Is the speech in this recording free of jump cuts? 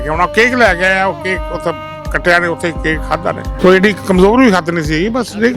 no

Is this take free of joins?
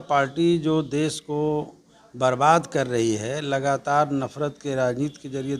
yes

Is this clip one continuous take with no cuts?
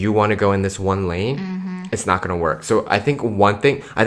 yes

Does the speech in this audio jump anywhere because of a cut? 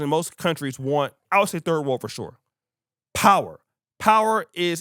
no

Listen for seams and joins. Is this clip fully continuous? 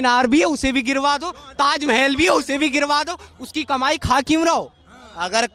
yes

